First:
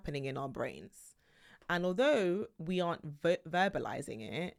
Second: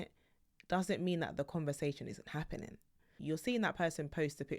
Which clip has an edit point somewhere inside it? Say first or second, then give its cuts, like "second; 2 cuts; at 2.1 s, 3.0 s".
second; 1 cut; at 3.2 s